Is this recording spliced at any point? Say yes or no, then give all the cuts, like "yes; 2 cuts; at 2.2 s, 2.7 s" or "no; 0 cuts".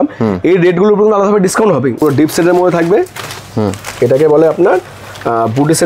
yes; 1 cut; at 2.0 s